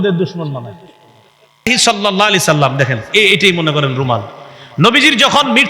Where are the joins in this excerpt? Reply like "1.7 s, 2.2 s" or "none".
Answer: 1.7 s